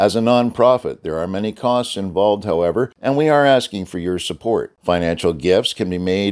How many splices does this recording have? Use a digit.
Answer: 1